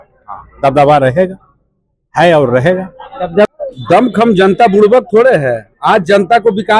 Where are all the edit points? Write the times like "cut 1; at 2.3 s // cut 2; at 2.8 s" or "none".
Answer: cut 1; at 3.5 s